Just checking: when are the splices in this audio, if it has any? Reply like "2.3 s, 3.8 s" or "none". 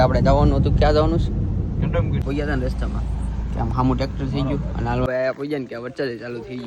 2.2 s, 5.1 s